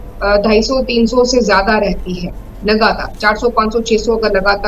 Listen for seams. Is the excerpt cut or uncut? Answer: uncut